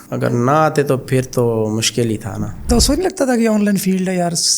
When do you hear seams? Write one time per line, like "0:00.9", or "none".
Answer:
0:02.7